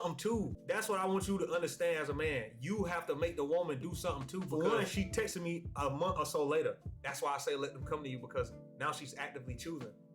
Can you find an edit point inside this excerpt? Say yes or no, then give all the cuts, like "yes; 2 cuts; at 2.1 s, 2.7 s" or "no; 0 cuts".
yes; 1 cut; at 4.5 s